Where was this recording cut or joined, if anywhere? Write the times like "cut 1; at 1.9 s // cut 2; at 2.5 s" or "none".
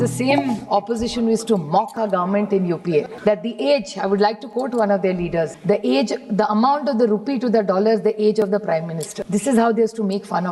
cut 1; at 3.1 s // cut 2; at 5.6 s // cut 3; at 9.1 s